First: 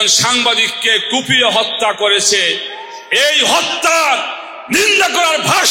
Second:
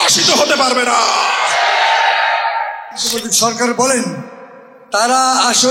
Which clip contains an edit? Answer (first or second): second